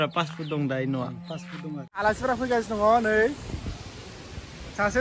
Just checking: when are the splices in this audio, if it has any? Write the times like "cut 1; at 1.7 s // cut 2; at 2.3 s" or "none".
cut 1; at 1.9 s